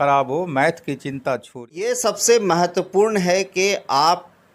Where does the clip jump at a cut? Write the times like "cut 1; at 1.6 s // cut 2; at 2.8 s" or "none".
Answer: cut 1; at 1.8 s

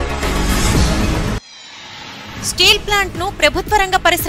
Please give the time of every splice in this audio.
cut 1; at 1.0 s

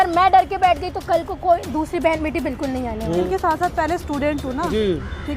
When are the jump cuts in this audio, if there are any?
cut 1; at 3.2 s

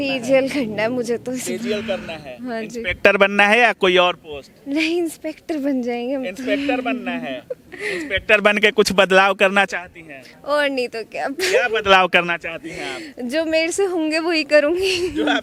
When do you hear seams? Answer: none

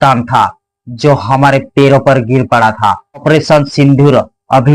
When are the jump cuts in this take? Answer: cut 1; at 3.2 s

